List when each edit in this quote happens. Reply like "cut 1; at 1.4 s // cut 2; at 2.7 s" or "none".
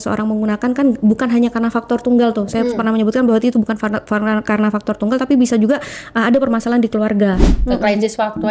cut 1; at 7.5 s